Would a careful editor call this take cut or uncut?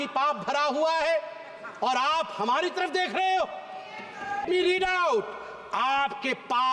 cut